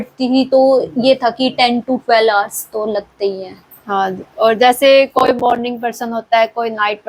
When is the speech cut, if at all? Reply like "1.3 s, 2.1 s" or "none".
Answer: none

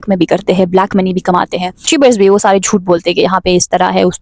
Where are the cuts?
1.9 s

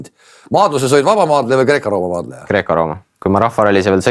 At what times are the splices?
3.1 s

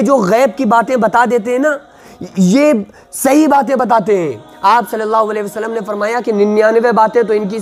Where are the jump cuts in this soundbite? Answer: none

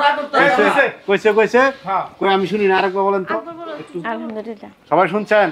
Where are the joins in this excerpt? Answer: none

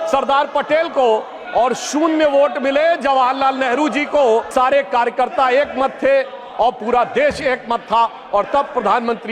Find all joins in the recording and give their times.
4.5 s

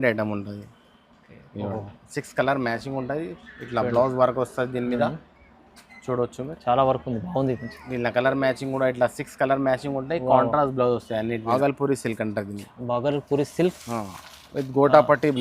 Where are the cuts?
11.5 s

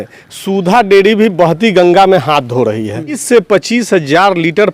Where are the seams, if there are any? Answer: 3.2 s

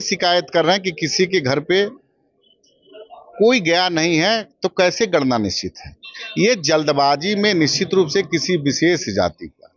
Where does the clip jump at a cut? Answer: none

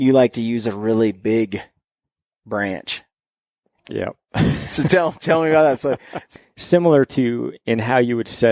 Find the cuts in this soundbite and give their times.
6.3 s

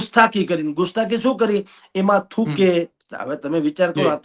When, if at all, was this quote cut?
none

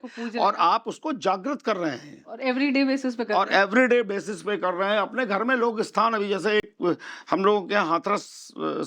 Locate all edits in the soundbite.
none

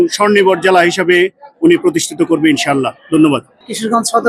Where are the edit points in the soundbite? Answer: none

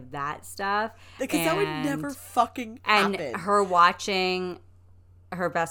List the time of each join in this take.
none

